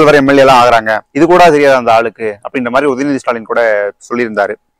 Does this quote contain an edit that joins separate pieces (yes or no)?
yes